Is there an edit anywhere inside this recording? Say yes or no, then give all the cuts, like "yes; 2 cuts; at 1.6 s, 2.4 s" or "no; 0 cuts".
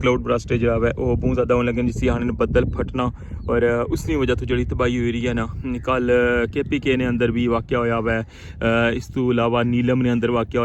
no; 0 cuts